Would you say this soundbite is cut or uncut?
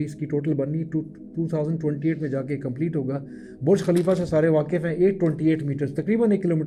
uncut